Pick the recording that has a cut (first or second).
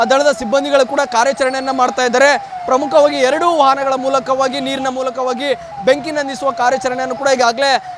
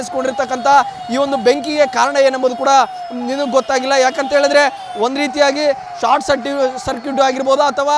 first